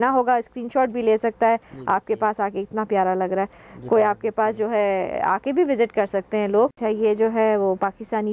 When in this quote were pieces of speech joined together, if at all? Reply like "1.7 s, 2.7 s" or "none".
6.8 s